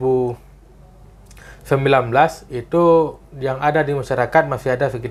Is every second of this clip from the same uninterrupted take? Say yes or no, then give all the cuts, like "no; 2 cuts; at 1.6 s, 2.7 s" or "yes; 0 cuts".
yes; 0 cuts